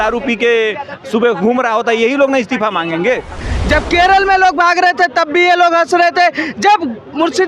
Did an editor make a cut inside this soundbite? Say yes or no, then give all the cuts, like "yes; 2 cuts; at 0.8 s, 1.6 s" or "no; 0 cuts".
yes; 1 cut; at 3.5 s